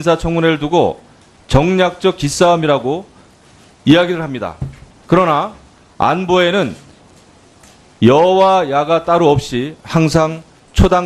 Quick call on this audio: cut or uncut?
cut